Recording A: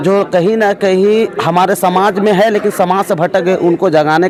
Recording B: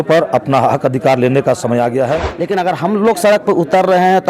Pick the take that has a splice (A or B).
B